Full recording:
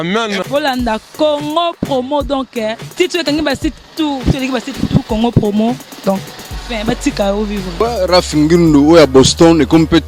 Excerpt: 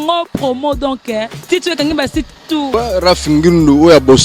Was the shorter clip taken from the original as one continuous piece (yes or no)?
no